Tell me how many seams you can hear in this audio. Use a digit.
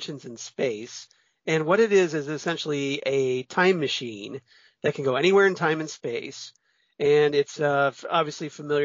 0